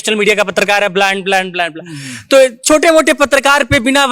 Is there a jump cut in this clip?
no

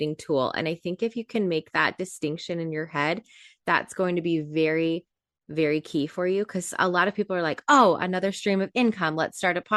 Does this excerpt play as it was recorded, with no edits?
yes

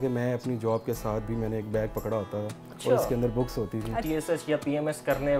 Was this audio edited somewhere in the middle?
yes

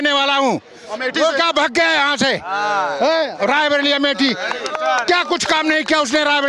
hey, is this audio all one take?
yes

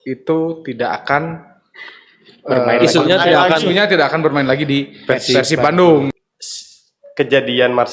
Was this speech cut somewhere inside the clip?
yes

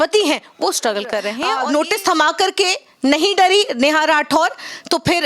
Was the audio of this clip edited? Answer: yes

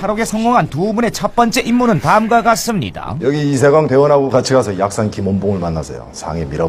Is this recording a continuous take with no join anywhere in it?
yes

